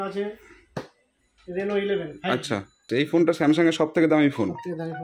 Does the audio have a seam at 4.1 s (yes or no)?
no